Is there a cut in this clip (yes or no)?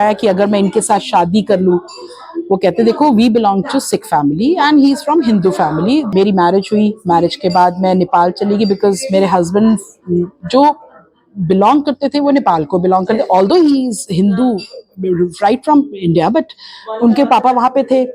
yes